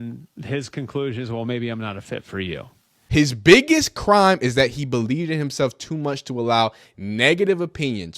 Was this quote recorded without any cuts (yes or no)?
no